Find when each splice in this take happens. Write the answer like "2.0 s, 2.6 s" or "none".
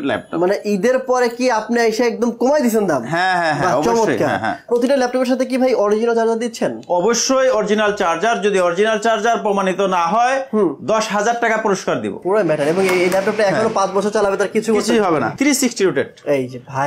4.7 s, 12.2 s, 15.3 s